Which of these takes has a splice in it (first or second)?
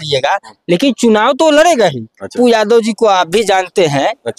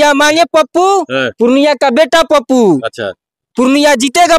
first